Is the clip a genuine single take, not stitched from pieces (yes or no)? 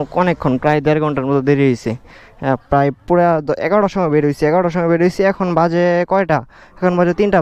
yes